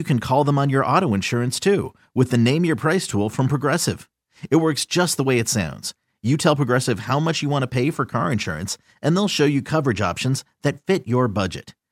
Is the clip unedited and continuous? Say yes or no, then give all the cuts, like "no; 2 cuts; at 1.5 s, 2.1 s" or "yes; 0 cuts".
yes; 0 cuts